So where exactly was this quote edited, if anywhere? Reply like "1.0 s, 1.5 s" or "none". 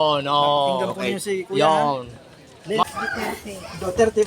2.8 s